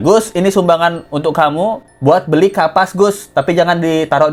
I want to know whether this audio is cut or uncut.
uncut